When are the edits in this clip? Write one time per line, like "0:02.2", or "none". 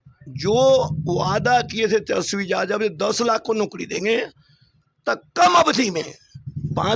none